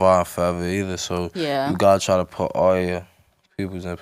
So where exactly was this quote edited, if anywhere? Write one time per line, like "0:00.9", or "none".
none